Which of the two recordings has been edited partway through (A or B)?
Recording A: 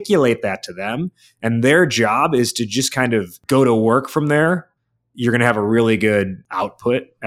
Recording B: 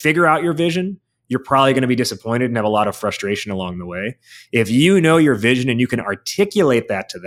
A